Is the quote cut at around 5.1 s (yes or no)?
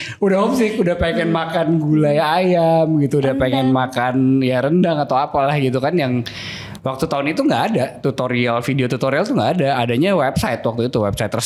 no